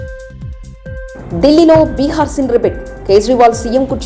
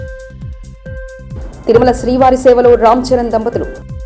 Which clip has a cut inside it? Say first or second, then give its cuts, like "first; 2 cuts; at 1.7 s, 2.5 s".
first; 1 cut; at 1.1 s